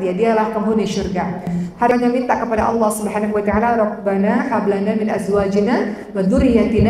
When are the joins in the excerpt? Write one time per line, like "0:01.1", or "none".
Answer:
0:01.9